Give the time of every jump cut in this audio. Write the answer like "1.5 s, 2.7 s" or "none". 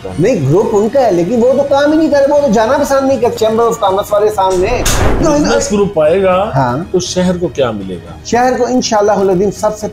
5.2 s